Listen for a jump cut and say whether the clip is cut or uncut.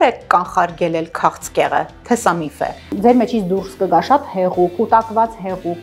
cut